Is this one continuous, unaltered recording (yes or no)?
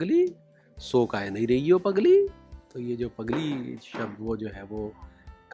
yes